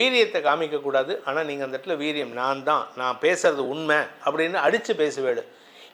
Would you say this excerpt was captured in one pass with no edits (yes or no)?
yes